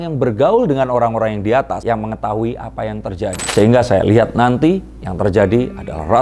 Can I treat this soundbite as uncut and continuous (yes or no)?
no